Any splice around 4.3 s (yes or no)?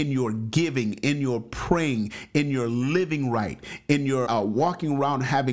yes